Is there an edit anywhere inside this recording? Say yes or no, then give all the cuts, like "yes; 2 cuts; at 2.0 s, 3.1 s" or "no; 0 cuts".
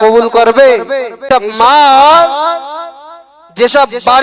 yes; 1 cut; at 1.2 s